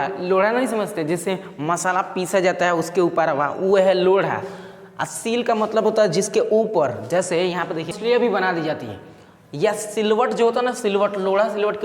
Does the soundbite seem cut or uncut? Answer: cut